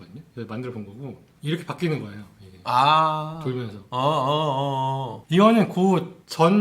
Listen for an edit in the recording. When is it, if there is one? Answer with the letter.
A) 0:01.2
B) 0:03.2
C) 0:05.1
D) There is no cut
C